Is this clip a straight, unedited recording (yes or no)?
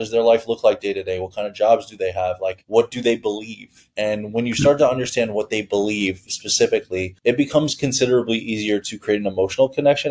yes